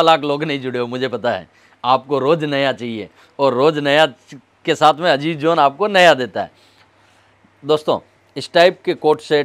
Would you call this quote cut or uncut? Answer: uncut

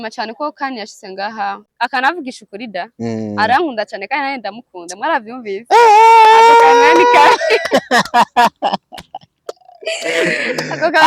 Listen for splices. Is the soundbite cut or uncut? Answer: cut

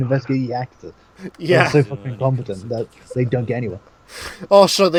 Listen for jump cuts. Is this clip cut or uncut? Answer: uncut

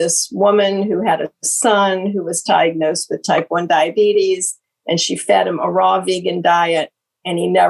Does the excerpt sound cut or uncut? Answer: uncut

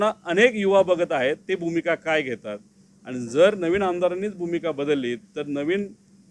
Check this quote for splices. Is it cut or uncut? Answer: uncut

